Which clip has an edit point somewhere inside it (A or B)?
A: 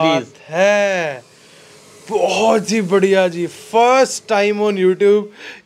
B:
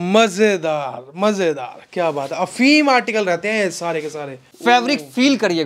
B